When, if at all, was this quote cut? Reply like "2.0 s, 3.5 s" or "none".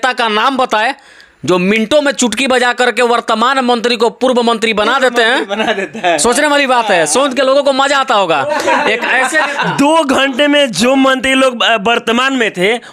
none